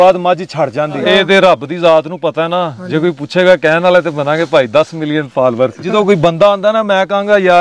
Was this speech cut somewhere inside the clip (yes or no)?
yes